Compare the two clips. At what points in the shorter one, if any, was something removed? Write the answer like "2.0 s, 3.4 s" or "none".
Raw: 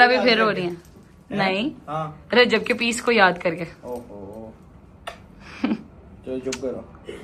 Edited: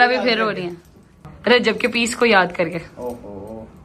1.2 s